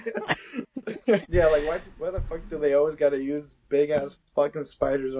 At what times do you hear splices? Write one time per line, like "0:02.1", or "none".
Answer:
0:01.3